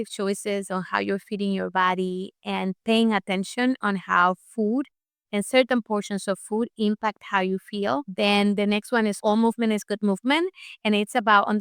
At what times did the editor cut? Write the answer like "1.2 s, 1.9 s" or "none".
9.2 s